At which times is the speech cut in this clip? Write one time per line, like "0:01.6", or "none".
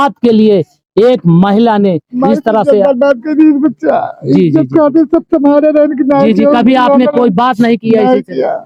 none